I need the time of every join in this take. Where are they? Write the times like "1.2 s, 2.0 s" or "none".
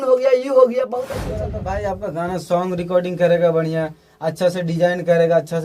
1.4 s